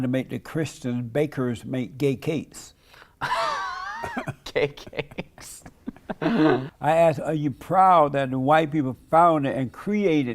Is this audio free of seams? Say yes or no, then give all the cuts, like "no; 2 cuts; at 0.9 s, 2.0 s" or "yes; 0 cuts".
no; 1 cut; at 6.7 s